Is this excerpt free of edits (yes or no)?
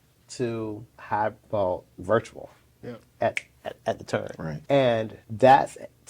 no